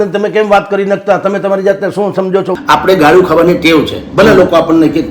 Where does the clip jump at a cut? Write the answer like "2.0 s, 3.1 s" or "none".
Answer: 2.5 s

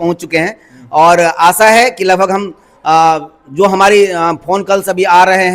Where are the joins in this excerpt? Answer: none

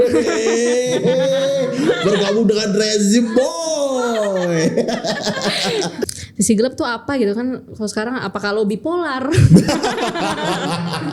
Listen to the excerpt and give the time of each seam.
6.0 s

